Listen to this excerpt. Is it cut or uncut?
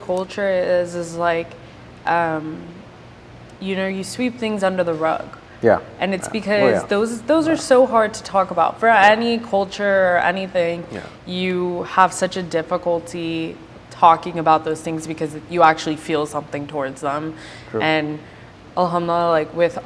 uncut